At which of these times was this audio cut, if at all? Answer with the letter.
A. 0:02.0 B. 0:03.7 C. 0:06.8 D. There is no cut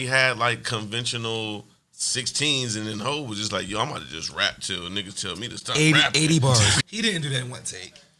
C